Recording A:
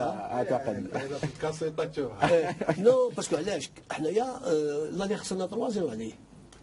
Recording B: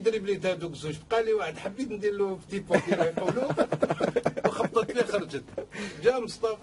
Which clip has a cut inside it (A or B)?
A